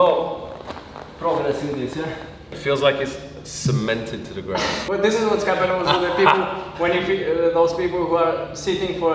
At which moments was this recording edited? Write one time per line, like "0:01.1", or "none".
0:02.5
0:04.7